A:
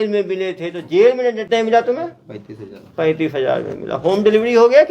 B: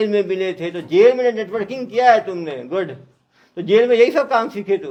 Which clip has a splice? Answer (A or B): A